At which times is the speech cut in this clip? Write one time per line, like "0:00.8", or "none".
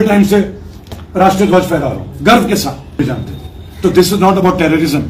0:03.0